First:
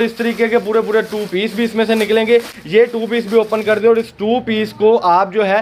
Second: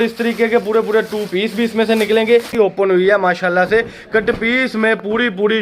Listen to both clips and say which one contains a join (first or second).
second